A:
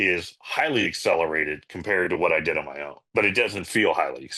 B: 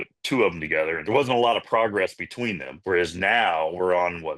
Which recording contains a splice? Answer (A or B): B